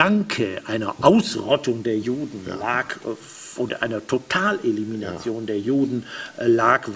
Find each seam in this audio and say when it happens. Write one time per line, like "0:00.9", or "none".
none